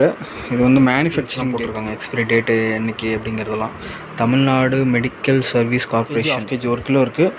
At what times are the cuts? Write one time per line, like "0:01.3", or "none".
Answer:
0:01.4
0:06.4